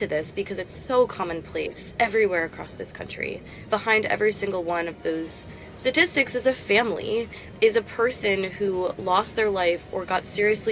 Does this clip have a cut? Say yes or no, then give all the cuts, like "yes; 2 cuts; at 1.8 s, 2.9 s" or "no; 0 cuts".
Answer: yes; 2 cuts; at 1.9 s, 3.7 s